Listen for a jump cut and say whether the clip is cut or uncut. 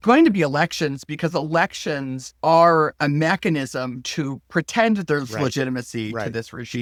uncut